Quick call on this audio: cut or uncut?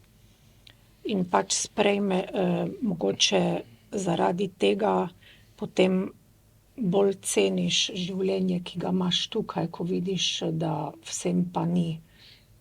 uncut